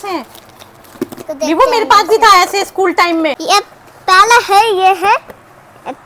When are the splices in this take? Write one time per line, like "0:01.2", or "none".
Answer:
0:03.4